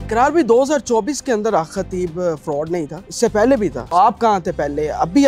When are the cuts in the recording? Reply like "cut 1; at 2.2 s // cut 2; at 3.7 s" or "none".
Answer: cut 1; at 3.0 s // cut 2; at 3.8 s

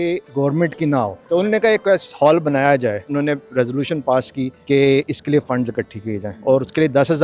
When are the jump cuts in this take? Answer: cut 1; at 1.2 s // cut 2; at 3.0 s // cut 3; at 4.6 s // cut 4; at 6.3 s

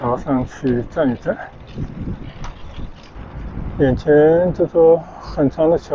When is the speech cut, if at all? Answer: cut 1; at 3.1 s

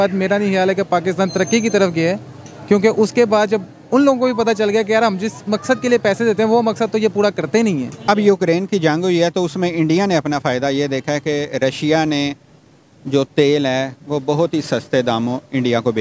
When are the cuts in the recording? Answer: cut 1; at 8.0 s

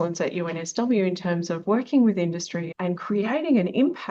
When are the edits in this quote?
none

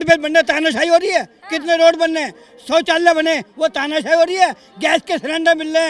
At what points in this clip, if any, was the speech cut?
none

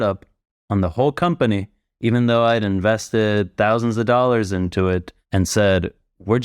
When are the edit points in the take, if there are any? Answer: cut 1; at 5.2 s

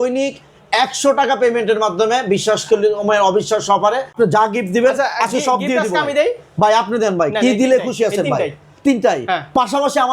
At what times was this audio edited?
cut 1; at 4.1 s

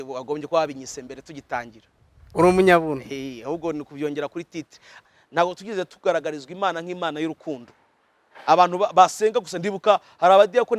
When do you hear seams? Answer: cut 1; at 5.0 s

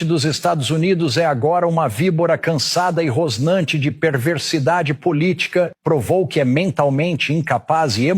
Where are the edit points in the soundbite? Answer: cut 1; at 5.7 s

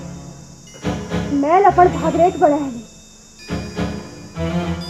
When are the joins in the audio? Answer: none

